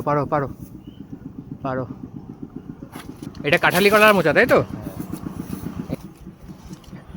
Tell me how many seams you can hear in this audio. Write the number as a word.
two